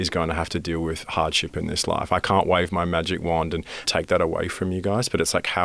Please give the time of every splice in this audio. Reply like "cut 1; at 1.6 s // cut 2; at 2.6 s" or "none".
cut 1; at 3.8 s